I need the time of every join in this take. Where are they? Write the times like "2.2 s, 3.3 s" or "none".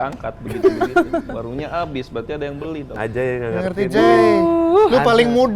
2.9 s